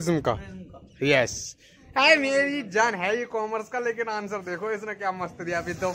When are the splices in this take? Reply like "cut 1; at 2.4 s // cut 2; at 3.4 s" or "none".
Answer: none